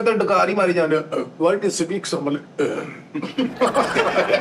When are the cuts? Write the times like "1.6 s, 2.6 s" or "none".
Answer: 3.5 s

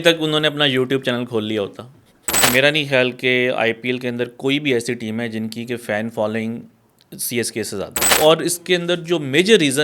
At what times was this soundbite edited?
2.4 s, 8.1 s

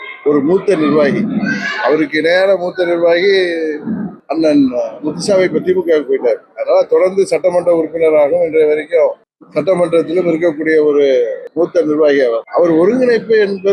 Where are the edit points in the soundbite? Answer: none

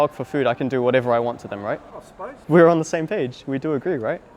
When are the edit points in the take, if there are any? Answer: 2.4 s

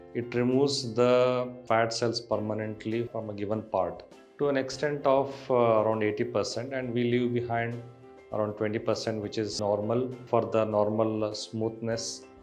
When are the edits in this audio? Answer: 3.1 s

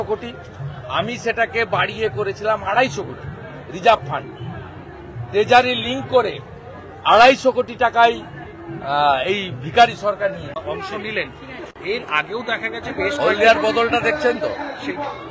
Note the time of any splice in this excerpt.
10.5 s

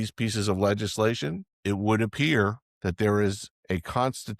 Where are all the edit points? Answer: 1.5 s, 2.7 s, 3.5 s

